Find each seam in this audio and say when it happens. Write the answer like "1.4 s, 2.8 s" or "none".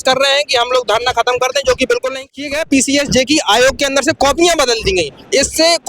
2.4 s